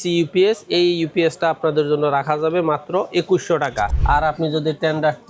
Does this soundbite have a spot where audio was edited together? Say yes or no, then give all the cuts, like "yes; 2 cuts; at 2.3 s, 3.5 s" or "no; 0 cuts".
yes; 1 cut; at 3.9 s